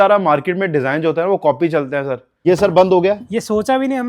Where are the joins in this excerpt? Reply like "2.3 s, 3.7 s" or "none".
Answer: 2.2 s